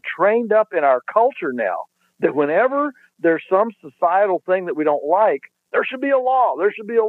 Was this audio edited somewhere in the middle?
no; 0 cuts

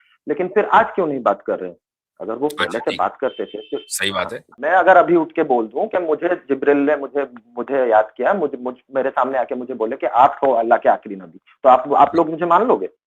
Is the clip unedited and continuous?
no; 1 cut; at 4.5 s

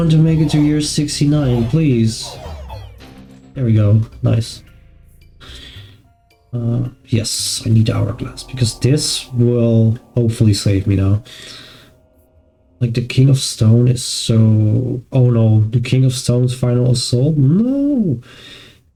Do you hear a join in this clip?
no; 0 cuts

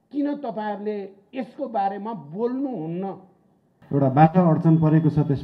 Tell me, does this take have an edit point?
yes; 1 cut; at 3.7 s

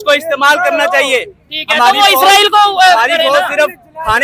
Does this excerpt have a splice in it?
no; 0 cuts

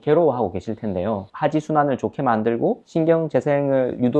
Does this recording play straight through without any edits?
no; 1 cut; at 1.3 s

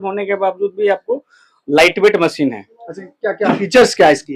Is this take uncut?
yes; 0 cuts

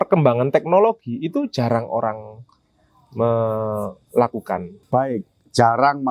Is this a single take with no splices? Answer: yes; 0 cuts

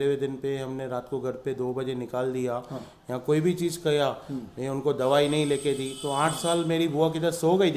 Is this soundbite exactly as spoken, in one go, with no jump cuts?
yes; 0 cuts

